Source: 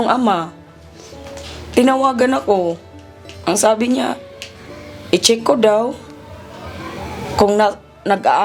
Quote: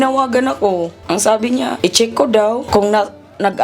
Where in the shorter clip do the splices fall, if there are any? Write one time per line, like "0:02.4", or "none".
0:01.0
0:01.8
0:02.6